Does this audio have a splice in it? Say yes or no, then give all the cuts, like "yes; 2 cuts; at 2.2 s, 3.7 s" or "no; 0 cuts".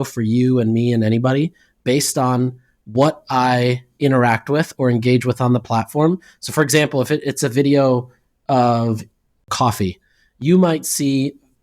yes; 1 cut; at 9.5 s